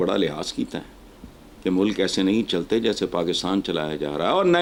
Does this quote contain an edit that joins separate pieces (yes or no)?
no